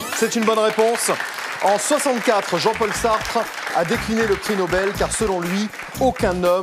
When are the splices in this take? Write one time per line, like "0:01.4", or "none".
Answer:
0:02.0